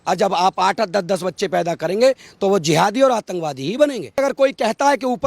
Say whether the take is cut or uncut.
cut